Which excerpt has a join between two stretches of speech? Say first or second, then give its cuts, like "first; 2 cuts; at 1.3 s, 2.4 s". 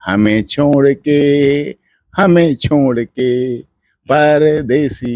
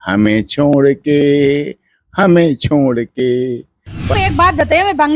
second; 1 cut; at 4.1 s